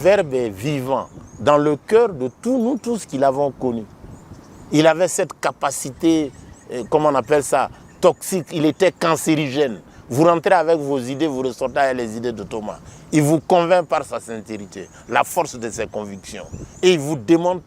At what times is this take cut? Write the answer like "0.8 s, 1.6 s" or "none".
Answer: none